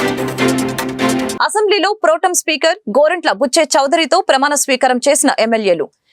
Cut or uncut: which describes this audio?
cut